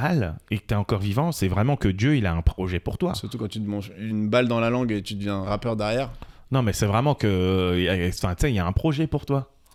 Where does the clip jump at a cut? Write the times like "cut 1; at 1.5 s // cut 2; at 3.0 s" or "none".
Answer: none